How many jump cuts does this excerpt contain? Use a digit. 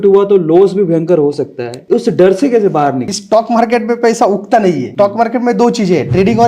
2